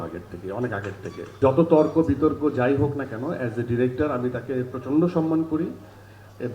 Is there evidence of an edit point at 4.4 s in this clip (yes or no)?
no